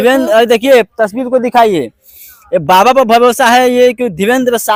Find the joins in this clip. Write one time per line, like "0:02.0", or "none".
none